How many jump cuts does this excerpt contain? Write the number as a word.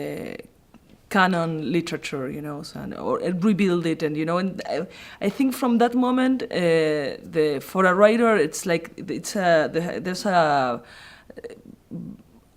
one